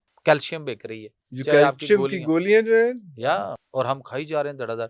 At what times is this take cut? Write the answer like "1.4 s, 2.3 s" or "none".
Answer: 3.5 s